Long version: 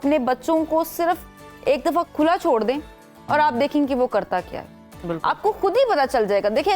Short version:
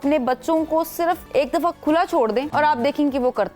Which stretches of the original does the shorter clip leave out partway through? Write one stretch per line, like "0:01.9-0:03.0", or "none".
0:01.2-0:01.6
0:02.8-0:03.2